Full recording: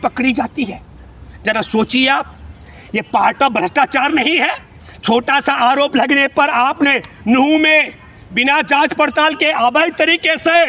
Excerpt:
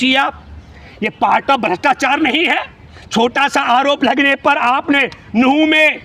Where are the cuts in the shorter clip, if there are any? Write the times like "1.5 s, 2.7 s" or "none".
none